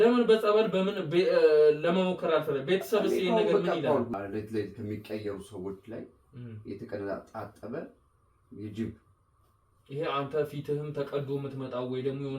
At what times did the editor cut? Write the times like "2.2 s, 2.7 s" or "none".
4.1 s